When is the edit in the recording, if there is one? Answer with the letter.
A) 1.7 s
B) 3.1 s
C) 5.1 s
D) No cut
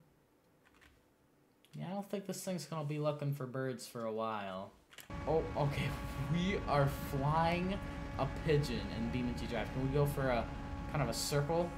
C